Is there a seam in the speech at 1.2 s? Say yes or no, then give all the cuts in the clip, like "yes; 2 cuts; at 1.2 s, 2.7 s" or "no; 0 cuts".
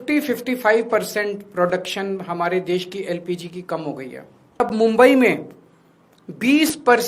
no; 1 cut; at 4.6 s